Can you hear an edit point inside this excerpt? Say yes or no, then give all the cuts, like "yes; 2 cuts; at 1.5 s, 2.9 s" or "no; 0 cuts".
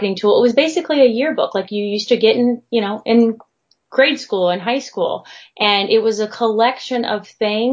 no; 0 cuts